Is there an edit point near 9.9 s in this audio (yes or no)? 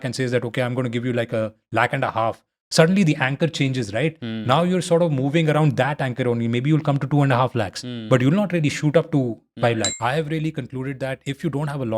yes